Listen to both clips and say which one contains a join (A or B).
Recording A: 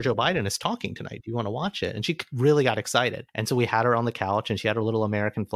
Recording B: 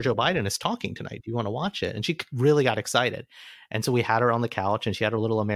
A